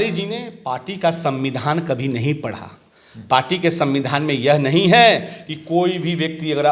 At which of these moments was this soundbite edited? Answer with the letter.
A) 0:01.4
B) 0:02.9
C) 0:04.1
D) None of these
D